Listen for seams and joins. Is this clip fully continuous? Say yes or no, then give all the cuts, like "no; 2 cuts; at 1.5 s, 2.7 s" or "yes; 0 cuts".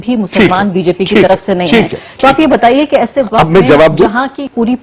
yes; 0 cuts